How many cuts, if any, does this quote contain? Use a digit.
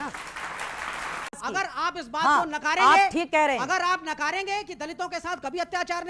1